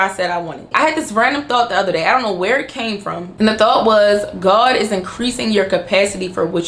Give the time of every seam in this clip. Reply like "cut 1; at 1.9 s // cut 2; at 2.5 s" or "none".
cut 1; at 3.2 s